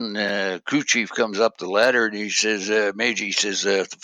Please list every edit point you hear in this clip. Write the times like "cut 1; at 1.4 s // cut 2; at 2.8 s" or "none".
none